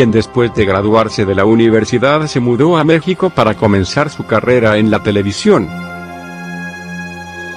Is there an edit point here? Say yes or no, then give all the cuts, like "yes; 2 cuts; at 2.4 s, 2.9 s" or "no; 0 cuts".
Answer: no; 0 cuts